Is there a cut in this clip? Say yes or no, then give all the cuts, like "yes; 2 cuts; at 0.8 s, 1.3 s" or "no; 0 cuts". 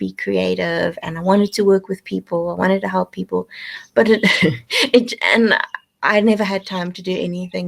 no; 0 cuts